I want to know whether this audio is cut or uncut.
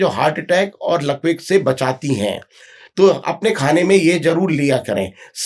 uncut